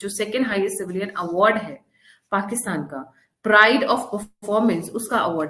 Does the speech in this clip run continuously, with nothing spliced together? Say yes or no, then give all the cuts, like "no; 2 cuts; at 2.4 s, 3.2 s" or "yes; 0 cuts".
yes; 0 cuts